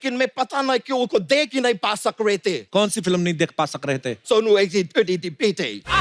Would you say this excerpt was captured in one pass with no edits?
no; 2 cuts; at 2.6 s, 4.2 s

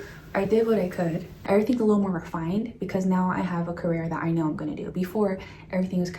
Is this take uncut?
no; 1 cut; at 1.3 s

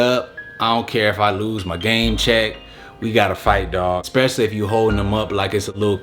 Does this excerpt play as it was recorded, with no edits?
no; 1 cut; at 4.0 s

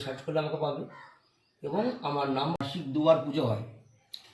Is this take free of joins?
no; 1 cut; at 2.6 s

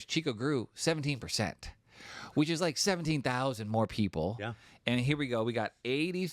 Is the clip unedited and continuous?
yes; 0 cuts

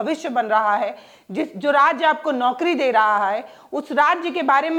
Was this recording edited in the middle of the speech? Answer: no; 0 cuts

